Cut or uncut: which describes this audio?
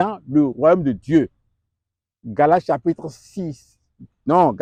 uncut